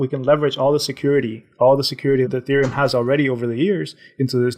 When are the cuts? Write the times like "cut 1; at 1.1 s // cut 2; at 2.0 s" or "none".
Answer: none

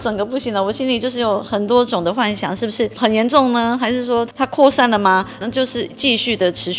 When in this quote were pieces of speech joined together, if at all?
cut 1; at 2.9 s // cut 2; at 4.3 s // cut 3; at 5.4 s

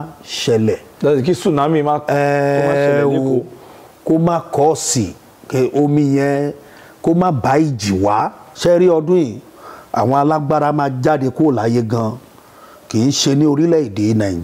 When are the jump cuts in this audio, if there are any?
cut 1; at 8.4 s

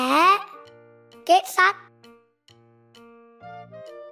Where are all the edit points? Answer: cut 1; at 1.8 s

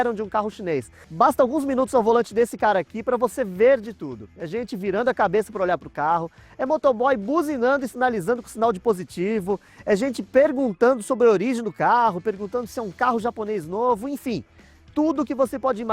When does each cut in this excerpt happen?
cut 1; at 1.0 s

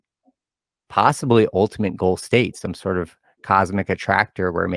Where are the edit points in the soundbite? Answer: none

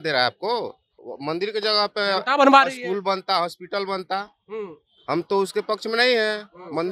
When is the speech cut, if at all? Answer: cut 1; at 1.0 s

